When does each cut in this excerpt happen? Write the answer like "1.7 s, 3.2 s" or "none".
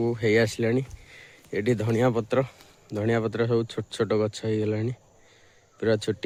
none